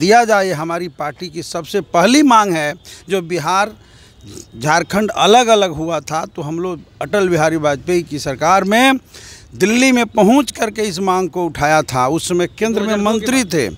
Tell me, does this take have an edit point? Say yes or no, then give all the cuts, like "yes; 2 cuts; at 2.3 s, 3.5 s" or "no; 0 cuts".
no; 0 cuts